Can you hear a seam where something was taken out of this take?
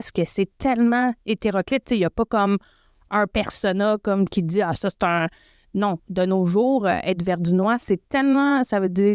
no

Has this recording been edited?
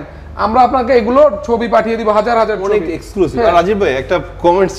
no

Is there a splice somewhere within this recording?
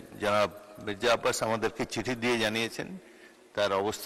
no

